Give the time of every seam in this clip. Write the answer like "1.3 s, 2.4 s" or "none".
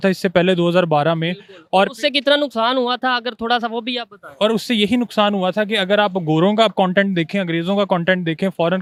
none